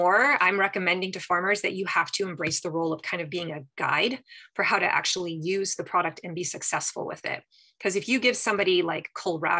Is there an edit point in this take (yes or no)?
no